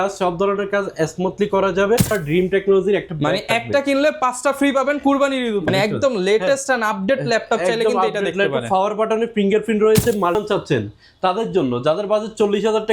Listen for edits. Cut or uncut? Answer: cut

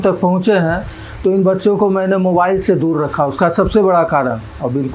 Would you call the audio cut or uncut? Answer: uncut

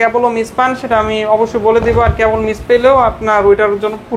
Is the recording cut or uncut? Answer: uncut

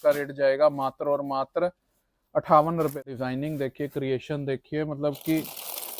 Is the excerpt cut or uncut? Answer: cut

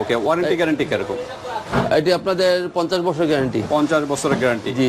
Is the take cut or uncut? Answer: uncut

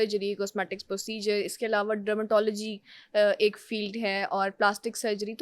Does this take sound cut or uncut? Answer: uncut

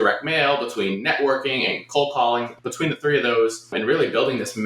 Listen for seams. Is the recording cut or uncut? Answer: cut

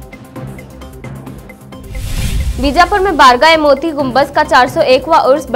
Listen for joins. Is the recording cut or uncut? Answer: uncut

